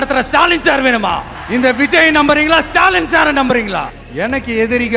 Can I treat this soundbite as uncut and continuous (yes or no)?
no